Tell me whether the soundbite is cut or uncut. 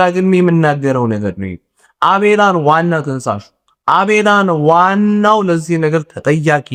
uncut